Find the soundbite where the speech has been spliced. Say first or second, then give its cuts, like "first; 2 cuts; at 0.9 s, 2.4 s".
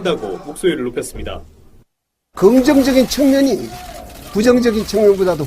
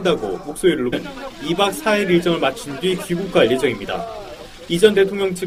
first; 1 cut; at 0.9 s